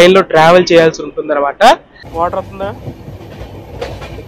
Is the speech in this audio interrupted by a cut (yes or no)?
yes